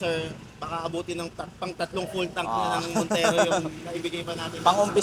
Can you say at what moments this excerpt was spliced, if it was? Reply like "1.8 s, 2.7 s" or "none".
none